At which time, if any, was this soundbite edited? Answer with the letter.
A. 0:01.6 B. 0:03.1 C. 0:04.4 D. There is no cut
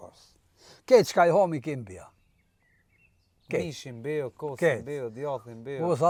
D